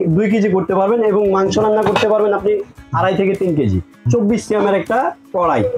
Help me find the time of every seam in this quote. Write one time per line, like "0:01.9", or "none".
0:04.1